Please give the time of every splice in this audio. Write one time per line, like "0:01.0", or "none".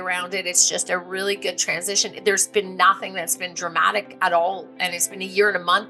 none